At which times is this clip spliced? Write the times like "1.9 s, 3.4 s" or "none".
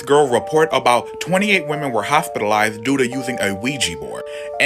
none